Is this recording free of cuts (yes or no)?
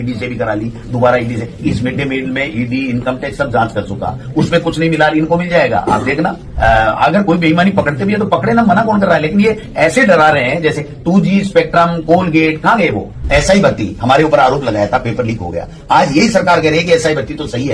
no